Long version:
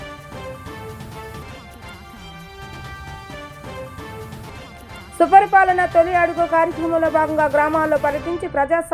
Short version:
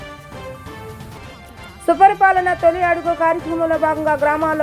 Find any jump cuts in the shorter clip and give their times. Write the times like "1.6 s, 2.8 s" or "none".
1.1 s